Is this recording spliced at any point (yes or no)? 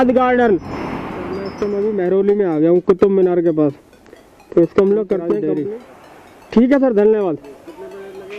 yes